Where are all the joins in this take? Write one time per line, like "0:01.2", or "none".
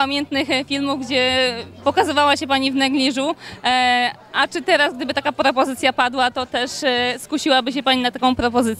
none